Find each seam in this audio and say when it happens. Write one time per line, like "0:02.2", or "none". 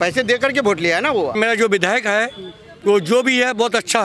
0:01.3